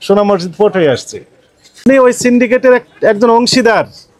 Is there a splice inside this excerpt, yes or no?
yes